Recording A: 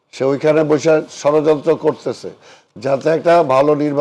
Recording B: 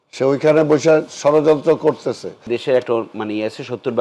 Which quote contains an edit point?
B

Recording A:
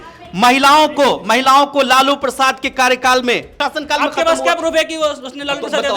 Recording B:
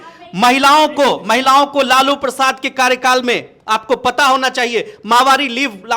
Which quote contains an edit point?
A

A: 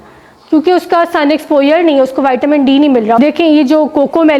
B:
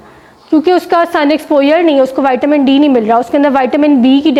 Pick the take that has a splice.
A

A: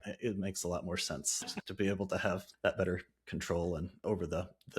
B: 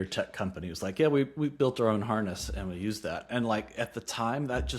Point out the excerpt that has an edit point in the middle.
A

